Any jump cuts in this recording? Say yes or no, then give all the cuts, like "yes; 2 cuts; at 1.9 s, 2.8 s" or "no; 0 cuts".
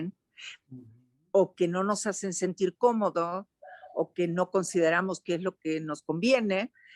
no; 0 cuts